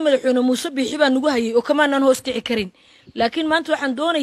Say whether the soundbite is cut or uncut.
uncut